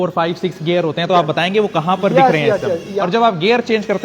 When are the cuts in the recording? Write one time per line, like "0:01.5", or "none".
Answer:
0:02.9